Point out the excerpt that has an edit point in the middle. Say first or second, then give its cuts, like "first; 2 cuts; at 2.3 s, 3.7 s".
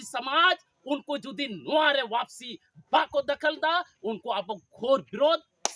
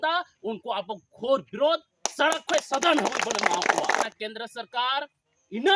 second; 1 cut; at 4.1 s